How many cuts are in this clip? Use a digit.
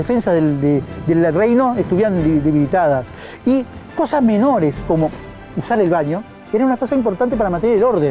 0